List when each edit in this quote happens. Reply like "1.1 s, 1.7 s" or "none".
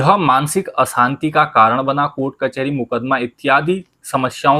none